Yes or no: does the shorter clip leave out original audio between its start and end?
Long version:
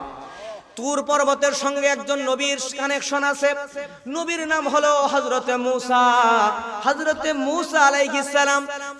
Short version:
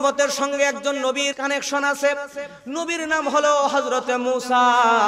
yes